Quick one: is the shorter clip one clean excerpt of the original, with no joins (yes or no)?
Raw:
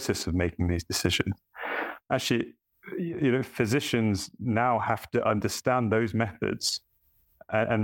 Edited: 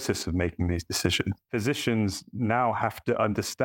no